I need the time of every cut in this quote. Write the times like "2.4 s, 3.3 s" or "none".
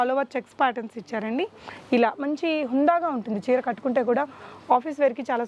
none